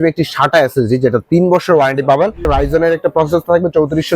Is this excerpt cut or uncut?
cut